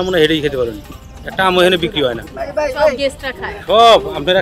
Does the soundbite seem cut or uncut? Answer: uncut